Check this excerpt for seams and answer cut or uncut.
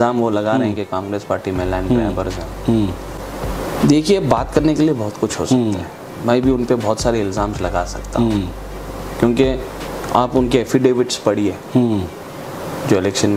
uncut